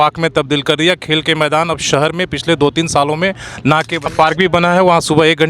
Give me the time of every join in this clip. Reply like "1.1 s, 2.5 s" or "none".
4.1 s